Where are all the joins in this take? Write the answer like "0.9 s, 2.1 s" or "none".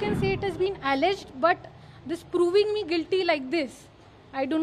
none